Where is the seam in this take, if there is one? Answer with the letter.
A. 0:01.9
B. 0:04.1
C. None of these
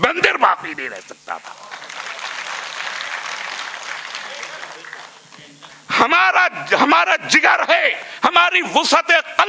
C